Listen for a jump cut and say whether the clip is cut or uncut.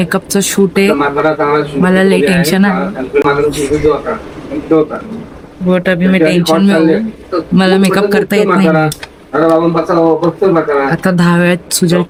uncut